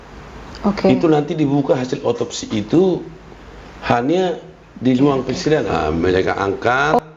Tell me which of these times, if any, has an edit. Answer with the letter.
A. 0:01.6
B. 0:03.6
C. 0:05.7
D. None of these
C